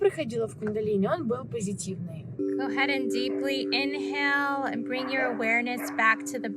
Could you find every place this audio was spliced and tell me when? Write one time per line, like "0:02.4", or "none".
0:02.4